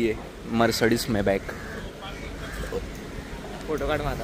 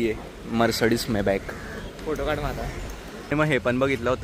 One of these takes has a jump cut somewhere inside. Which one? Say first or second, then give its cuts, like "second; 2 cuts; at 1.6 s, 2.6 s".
second; 2 cuts; at 1.9 s, 3.3 s